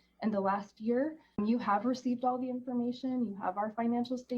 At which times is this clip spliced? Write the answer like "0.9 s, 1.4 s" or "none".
1.4 s